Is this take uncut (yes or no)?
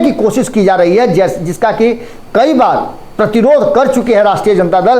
yes